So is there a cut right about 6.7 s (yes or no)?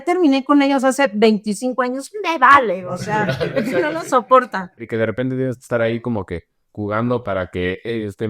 no